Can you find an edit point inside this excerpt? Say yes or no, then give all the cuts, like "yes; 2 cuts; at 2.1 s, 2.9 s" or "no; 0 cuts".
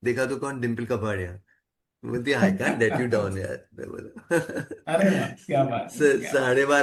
no; 0 cuts